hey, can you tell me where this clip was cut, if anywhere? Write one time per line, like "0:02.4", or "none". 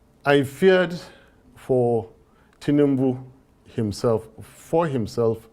none